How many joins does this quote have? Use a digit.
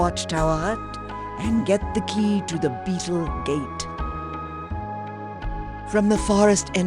2